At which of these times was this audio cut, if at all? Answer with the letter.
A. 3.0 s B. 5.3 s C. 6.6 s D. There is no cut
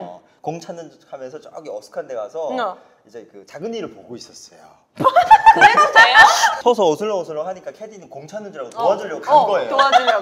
C